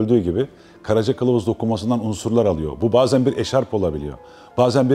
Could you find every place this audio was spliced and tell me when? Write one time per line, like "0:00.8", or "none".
none